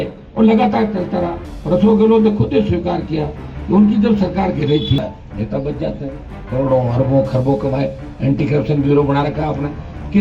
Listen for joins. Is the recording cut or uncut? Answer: cut